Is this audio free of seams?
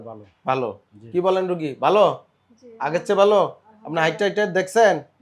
yes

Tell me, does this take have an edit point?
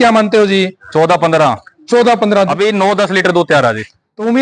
yes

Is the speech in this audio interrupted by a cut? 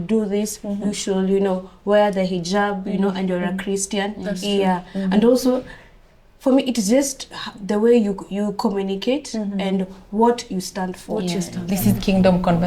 yes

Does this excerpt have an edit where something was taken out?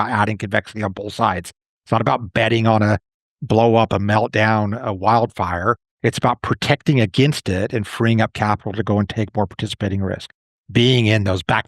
no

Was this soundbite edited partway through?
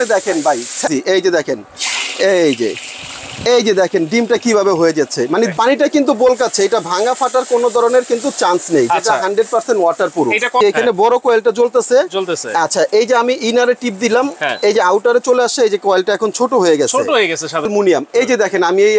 yes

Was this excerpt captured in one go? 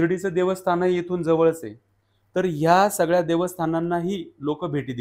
yes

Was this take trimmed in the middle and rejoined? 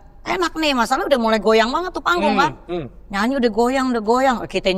no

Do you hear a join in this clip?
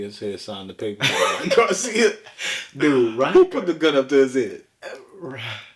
no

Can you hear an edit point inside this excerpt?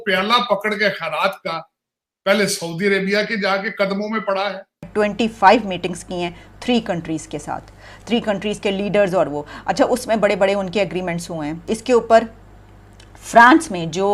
yes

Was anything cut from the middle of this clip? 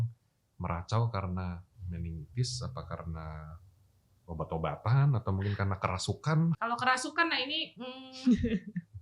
yes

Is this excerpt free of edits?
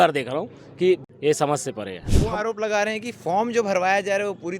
no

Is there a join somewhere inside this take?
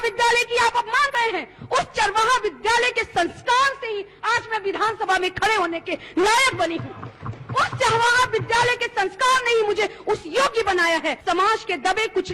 yes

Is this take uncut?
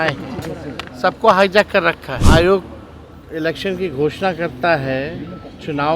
no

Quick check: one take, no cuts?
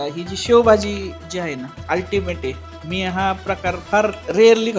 no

